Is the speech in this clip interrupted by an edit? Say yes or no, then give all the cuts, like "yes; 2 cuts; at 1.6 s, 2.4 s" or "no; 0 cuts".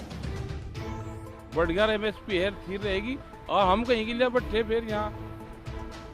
yes; 1 cut; at 1.6 s